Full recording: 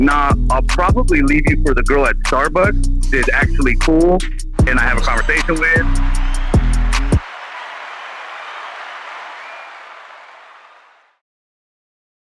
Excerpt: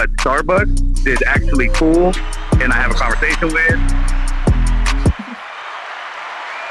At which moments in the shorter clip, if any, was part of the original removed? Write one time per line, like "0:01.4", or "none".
0:05.2

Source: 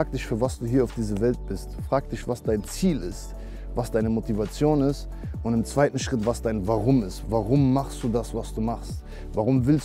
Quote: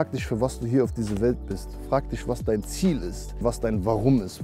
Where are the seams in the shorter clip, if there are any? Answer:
0:03.4

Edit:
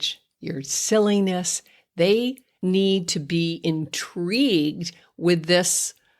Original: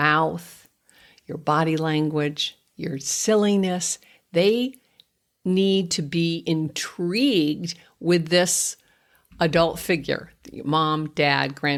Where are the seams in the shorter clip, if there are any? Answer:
0:02.5

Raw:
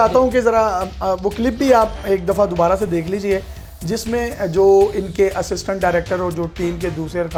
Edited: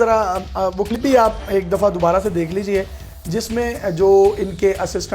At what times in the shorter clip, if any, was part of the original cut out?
0:01.0

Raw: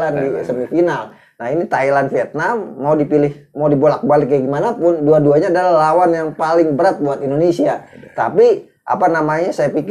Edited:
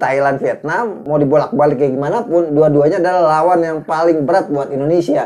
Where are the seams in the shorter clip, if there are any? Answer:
0:01.0

